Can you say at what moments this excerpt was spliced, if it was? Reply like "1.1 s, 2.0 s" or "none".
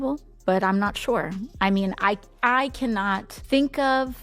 3.3 s

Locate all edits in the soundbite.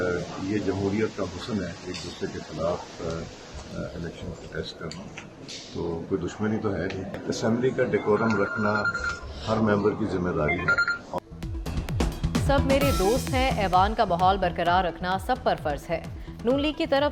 none

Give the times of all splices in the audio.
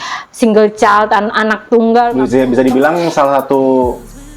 2.1 s

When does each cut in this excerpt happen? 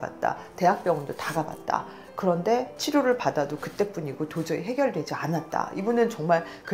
2.7 s

